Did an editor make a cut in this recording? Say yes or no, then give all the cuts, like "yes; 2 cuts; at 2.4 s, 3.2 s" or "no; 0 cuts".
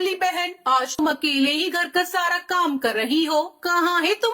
yes; 1 cut; at 1.0 s